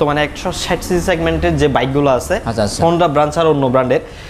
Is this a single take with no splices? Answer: yes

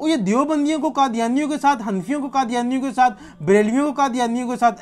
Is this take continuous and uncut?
yes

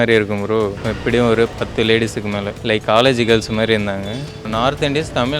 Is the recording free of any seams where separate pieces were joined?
no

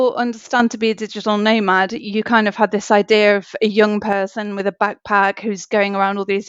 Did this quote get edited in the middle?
no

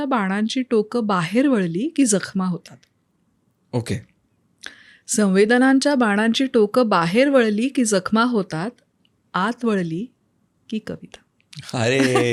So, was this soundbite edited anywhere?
no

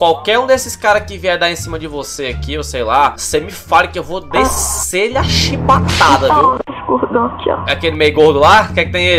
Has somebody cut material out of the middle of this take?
no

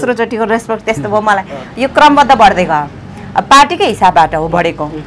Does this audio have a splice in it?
no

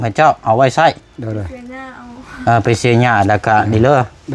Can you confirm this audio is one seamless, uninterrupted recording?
yes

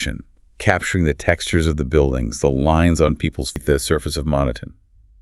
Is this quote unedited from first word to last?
no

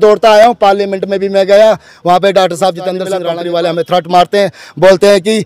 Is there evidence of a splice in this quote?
yes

